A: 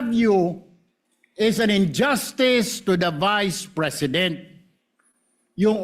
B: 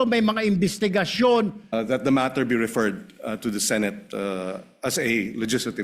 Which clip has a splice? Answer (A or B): B